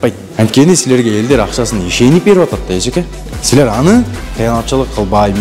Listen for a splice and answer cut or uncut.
uncut